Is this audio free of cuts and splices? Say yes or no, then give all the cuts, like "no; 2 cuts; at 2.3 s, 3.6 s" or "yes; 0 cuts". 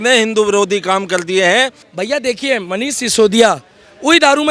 no; 1 cut; at 1.8 s